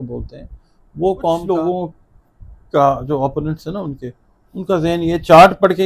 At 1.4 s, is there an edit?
yes; 1 cut; at 1.4 s

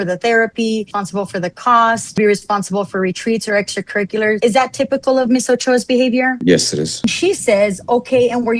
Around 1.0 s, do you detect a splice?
yes; 4 cuts; at 1.0 s, 2.2 s, 4.4 s, 7.0 s

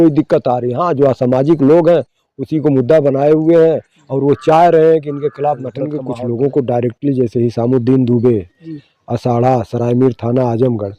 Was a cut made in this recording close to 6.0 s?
yes; 1 cut; at 6.0 s

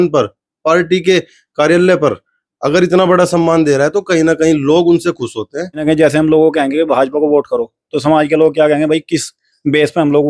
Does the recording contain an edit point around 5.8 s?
yes; 1 cut; at 5.8 s

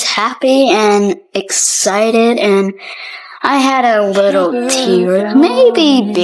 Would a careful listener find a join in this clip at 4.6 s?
no; 0 cuts

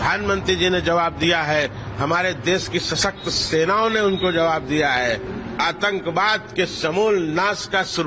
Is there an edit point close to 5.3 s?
yes; 1 cut; at 5.3 s

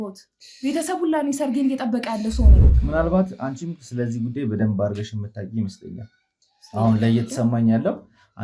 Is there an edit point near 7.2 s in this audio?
no; 1 cut; at 2.7 s

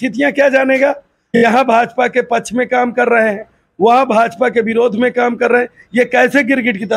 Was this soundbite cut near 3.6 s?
no; 1 cut; at 1.2 s

